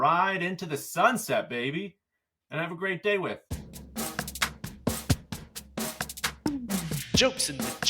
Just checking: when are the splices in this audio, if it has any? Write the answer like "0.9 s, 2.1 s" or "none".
3.4 s